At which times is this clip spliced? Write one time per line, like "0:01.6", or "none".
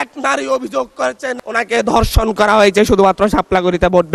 none